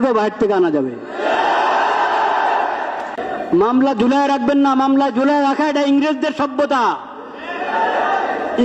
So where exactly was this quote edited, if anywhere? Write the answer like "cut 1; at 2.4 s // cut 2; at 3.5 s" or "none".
cut 1; at 3.2 s